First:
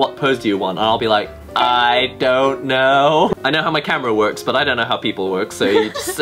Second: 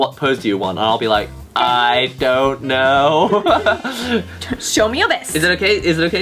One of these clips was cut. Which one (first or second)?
first